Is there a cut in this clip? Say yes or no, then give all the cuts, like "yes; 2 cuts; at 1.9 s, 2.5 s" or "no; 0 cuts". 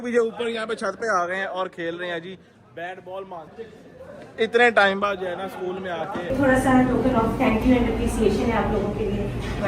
yes; 2 cuts; at 3.6 s, 6.3 s